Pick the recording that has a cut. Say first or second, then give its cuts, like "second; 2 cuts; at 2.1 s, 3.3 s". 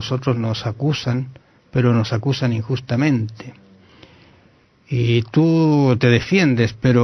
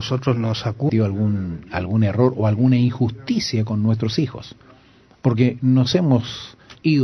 first; 1 cut; at 0.9 s